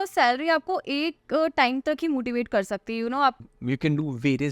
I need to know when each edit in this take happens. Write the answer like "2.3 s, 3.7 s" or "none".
3.4 s